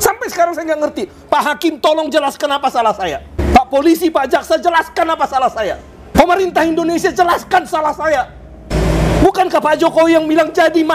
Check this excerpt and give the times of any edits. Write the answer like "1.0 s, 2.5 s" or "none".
6.1 s, 8.7 s